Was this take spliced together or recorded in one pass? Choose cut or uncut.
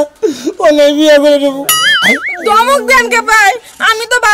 cut